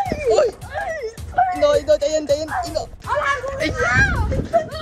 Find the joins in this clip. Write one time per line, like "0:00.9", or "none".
0:03.0